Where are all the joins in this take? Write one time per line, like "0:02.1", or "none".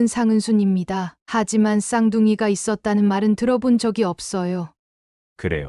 0:04.8